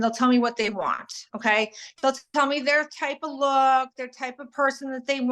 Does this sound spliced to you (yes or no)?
no